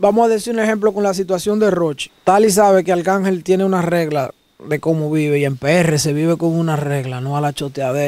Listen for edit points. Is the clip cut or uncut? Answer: cut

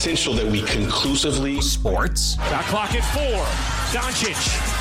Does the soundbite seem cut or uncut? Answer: uncut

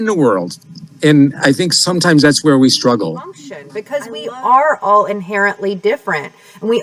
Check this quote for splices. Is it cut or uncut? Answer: cut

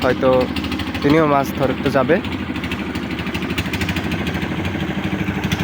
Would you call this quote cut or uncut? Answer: uncut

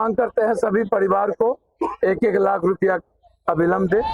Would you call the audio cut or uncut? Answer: uncut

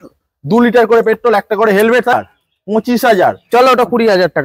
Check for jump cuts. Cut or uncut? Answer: cut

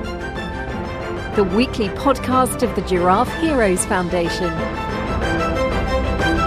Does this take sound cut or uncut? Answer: uncut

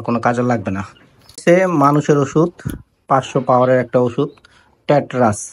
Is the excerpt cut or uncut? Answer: cut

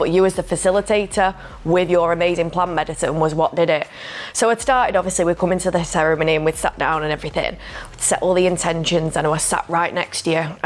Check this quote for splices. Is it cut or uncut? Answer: uncut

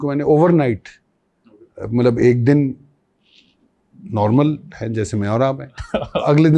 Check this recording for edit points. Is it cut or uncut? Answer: uncut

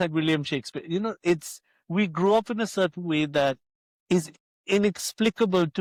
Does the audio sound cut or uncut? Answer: uncut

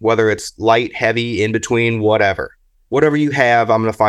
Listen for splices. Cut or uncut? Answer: uncut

